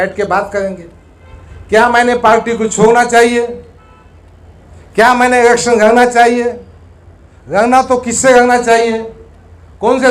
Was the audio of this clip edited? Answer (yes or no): no